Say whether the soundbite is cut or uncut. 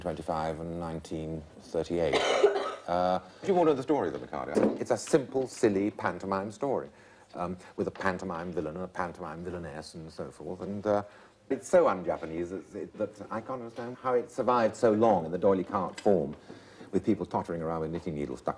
cut